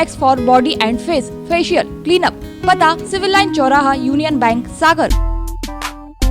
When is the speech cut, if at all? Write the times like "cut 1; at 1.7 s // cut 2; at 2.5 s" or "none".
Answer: cut 1; at 5.1 s